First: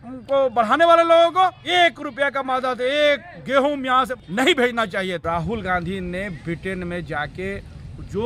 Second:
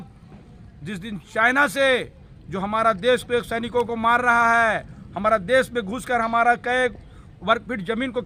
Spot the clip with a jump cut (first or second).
first